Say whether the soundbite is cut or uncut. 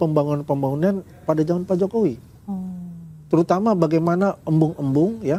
uncut